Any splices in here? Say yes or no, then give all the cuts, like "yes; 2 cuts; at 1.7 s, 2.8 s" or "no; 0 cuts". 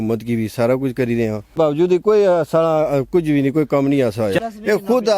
yes; 2 cuts; at 1.6 s, 4.4 s